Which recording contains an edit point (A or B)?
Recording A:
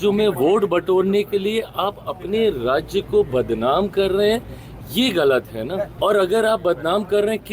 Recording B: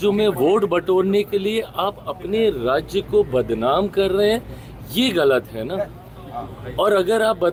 A